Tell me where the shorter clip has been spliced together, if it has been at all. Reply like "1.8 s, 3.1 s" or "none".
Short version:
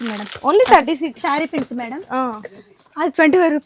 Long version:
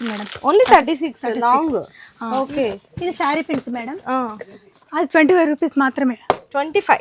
1.2 s